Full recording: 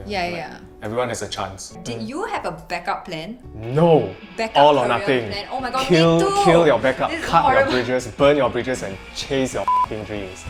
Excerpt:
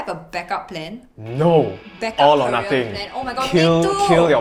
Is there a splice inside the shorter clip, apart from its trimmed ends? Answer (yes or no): no